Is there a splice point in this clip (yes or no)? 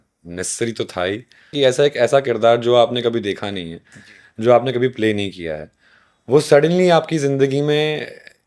yes